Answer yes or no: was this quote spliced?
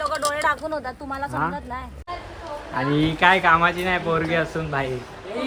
yes